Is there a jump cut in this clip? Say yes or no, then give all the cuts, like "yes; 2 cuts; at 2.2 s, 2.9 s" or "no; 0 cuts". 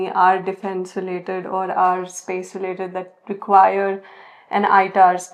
no; 0 cuts